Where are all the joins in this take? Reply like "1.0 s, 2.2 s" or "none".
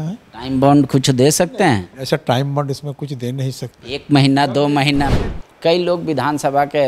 5.3 s